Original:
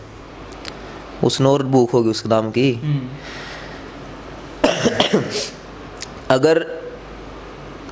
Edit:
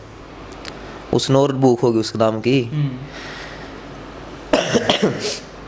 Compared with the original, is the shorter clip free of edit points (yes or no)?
no